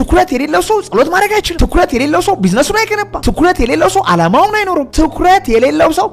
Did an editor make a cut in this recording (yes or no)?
yes